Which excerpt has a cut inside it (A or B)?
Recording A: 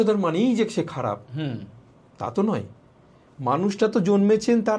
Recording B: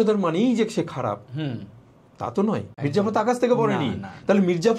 B